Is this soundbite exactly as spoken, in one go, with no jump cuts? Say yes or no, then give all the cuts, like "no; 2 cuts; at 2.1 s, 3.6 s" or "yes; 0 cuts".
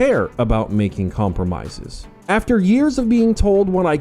no; 1 cut; at 2.2 s